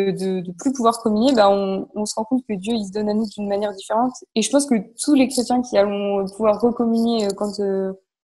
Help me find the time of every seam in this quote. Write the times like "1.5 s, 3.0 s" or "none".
4.2 s